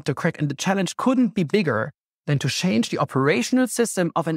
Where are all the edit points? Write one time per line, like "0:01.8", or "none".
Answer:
none